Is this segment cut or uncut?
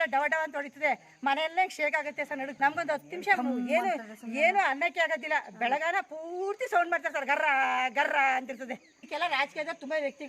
cut